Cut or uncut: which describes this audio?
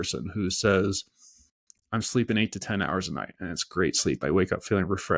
uncut